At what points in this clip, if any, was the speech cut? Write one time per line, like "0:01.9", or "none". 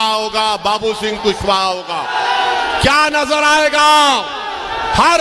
0:02.0